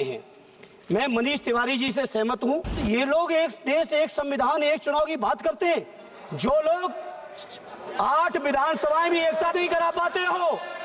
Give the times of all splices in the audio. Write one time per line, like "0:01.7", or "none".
0:02.8